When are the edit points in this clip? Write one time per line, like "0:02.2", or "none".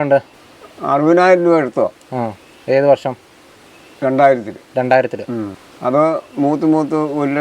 0:05.6